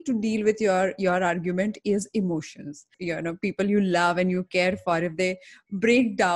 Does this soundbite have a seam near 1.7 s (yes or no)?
no